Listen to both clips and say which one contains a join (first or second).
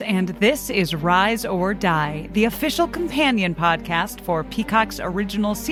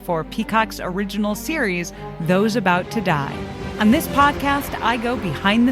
second